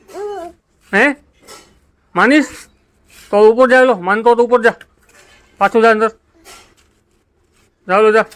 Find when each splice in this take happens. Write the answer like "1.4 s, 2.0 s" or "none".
none